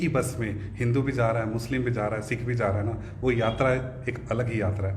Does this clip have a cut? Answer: no; 0 cuts

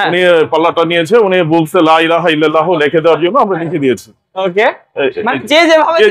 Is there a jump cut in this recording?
no; 0 cuts

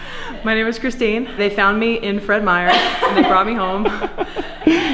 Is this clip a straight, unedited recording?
no; 1 cut; at 1.3 s

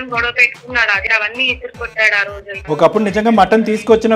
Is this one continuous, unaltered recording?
no; 2 cuts; at 1.0 s, 2.6 s

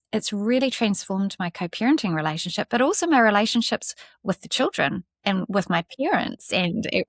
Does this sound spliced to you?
no; 0 cuts

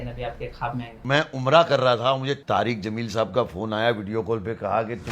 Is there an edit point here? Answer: yes; 1 cut; at 1.0 s

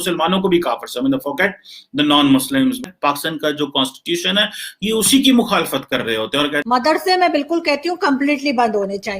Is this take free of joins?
no; 2 cuts; at 2.8 s, 6.6 s

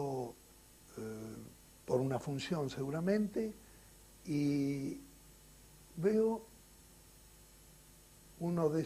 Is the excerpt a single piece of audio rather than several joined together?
no; 1 cut; at 1.6 s

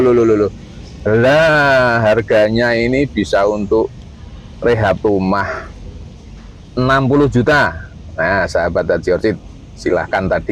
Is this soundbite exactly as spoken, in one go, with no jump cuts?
yes; 0 cuts

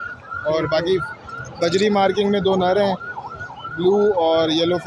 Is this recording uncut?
yes; 0 cuts

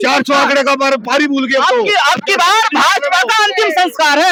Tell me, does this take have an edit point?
no; 0 cuts

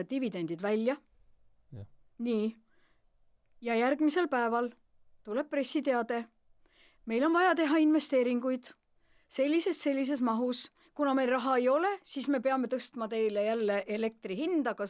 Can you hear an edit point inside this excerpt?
no; 0 cuts

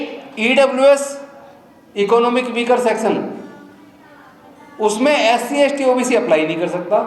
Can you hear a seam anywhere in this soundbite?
no; 0 cuts

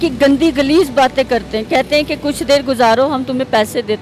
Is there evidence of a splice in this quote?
no; 0 cuts

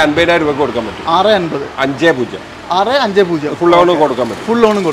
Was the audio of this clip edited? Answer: no; 0 cuts

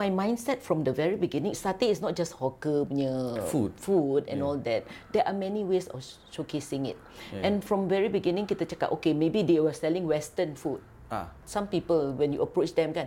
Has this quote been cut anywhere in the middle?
no; 0 cuts

